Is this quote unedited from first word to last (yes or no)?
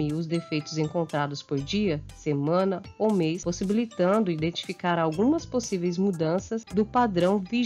no